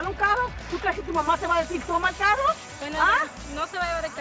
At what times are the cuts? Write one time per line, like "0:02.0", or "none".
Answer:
0:02.7